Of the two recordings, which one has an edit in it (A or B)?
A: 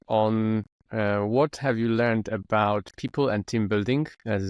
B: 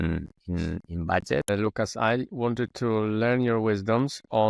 B